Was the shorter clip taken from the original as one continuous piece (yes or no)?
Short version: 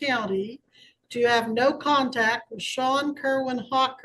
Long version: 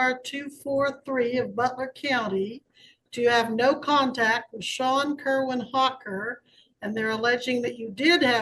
yes